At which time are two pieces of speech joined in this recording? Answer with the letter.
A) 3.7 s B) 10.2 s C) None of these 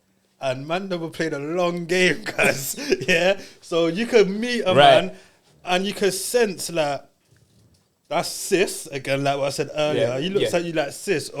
C